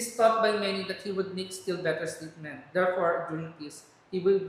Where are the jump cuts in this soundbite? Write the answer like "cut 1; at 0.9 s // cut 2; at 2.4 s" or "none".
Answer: none